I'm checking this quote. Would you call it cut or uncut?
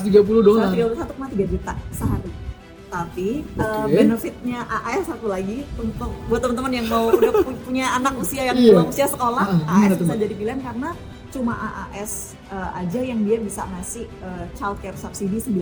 uncut